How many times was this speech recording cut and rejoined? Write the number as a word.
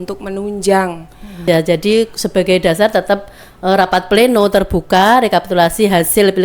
one